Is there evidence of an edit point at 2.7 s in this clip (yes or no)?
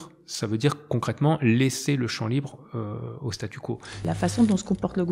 no